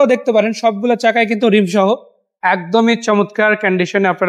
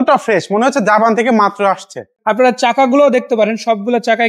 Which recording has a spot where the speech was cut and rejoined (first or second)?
second